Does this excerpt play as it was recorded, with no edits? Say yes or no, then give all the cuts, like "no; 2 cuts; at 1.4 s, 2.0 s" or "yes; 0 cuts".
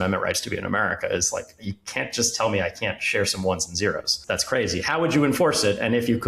no; 1 cut; at 4.2 s